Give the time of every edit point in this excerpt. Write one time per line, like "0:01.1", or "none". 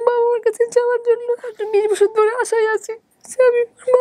0:01.5